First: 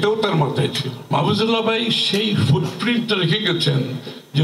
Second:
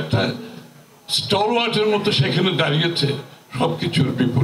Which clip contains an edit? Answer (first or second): first